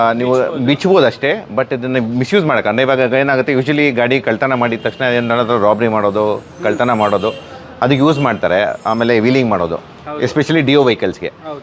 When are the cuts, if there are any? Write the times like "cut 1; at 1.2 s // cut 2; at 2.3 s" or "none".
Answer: none